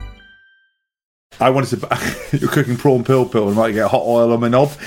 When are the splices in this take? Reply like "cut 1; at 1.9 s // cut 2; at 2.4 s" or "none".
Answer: cut 1; at 1.3 s